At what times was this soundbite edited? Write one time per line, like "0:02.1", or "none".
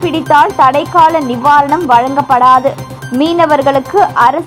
none